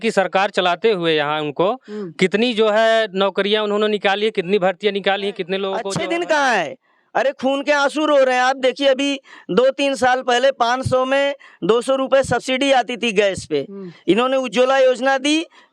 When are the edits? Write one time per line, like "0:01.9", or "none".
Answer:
0:05.9